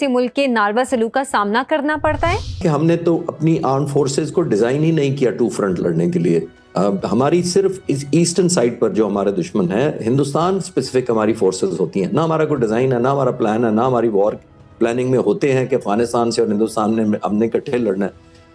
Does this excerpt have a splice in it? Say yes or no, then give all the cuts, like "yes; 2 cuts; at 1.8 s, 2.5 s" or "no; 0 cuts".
yes; 1 cut; at 2.6 s